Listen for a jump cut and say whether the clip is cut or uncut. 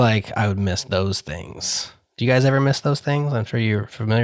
uncut